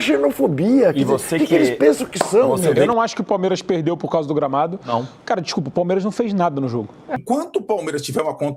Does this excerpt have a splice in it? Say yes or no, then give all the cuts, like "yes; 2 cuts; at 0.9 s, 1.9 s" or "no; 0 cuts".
yes; 2 cuts; at 2.8 s, 7.2 s